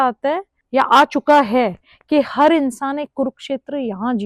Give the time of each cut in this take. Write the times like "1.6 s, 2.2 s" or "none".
none